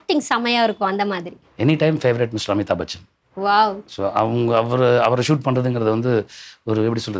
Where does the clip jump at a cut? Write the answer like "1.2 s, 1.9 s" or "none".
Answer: none